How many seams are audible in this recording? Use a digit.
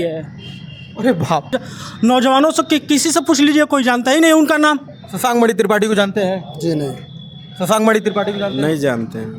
1